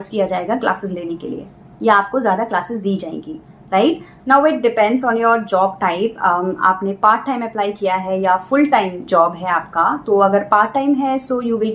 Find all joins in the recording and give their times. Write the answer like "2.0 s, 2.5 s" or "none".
none